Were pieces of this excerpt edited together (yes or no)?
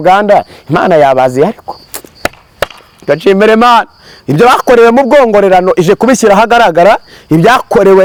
no